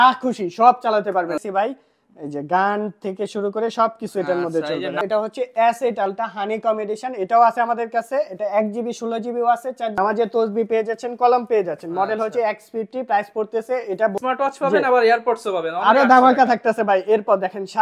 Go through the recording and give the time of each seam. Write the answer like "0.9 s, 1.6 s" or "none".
1.4 s, 5.0 s, 10.0 s, 14.2 s